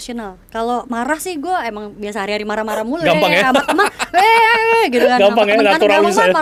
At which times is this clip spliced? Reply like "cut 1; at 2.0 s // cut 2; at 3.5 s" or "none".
none